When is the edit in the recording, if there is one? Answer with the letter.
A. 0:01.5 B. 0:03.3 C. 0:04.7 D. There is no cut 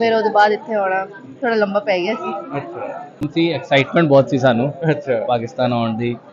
B